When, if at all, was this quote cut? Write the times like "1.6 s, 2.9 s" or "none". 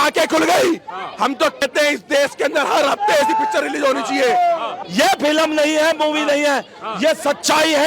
1.6 s, 4.7 s